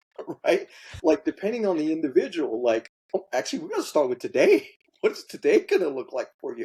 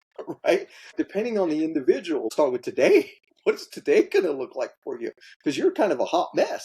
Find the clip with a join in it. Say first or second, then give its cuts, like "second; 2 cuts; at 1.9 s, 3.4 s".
second; 2 cuts; at 0.9 s, 2.3 s